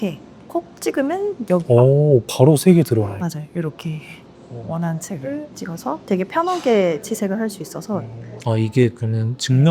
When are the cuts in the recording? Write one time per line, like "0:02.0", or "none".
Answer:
0:05.5
0:08.3